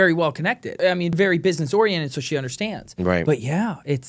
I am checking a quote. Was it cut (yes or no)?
yes